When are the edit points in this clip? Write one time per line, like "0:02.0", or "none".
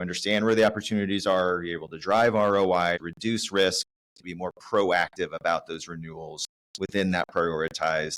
0:03.1
0:04.2